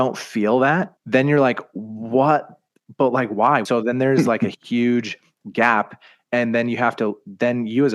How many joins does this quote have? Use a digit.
2